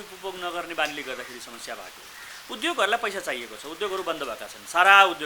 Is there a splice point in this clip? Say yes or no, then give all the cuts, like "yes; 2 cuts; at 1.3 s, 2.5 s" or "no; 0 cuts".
no; 0 cuts